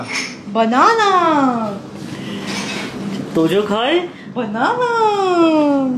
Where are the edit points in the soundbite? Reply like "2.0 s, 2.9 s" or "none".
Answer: none